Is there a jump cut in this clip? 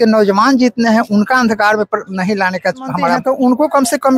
yes; 1 cut; at 3.2 s

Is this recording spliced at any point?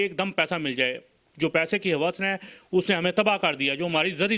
no; 0 cuts

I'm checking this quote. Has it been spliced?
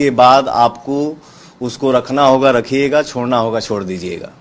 no; 0 cuts

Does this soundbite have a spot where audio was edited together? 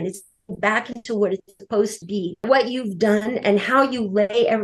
yes; 1 cut; at 2.4 s

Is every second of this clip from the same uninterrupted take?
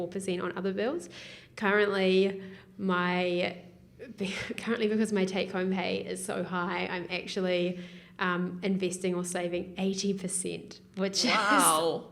yes; 0 cuts

